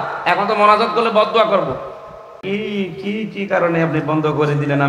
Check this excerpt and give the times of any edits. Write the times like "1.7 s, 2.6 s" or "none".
2.4 s